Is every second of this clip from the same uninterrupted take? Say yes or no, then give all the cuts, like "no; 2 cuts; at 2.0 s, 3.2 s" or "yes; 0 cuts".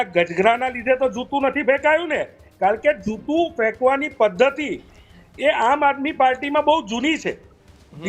yes; 0 cuts